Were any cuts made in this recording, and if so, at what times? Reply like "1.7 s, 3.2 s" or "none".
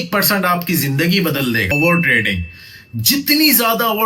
1.7 s